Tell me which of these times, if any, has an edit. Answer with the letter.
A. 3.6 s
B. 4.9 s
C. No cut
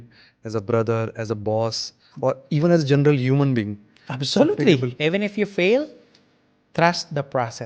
B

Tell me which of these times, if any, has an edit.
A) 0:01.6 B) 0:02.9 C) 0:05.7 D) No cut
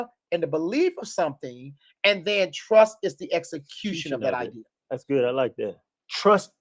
C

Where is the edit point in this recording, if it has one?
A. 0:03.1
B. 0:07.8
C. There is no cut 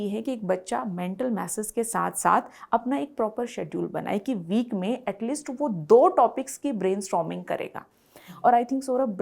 C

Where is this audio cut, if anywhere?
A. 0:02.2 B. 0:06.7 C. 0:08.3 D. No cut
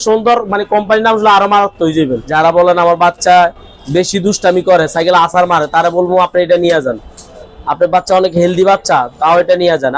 A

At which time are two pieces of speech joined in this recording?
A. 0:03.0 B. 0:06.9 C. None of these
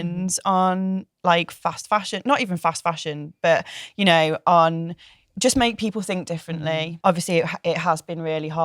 B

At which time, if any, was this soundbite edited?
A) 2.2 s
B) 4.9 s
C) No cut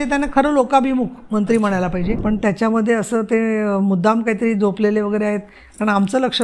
A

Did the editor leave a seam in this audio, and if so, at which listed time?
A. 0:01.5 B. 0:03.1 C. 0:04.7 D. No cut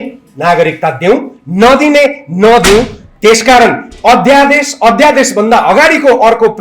D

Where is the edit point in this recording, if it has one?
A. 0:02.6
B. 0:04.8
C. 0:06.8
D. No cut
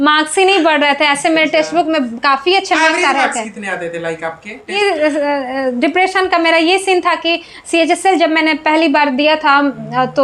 B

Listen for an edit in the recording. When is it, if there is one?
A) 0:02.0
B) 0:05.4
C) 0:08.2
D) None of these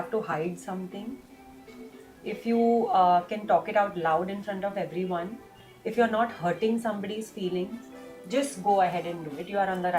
D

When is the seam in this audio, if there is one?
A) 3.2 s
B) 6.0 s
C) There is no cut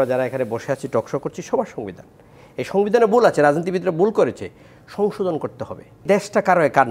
B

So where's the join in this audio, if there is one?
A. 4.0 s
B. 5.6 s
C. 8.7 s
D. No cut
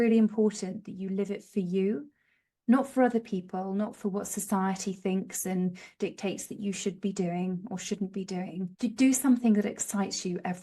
C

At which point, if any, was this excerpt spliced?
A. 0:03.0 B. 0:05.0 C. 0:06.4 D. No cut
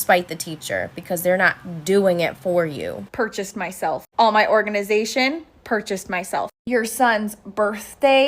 A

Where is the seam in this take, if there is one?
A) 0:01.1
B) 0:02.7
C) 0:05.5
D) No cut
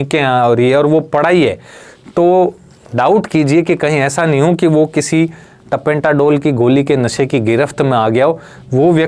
D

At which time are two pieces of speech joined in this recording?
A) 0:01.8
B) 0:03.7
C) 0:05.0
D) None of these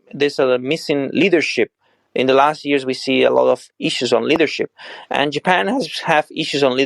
D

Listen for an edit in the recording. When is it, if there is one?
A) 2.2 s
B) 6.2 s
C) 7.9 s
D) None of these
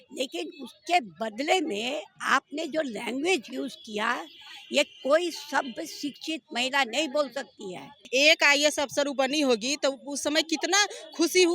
C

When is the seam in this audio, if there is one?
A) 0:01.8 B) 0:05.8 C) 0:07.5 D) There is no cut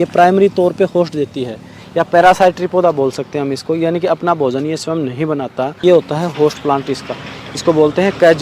B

